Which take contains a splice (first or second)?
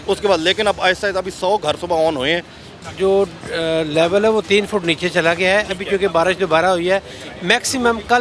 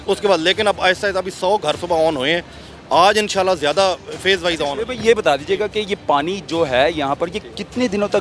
first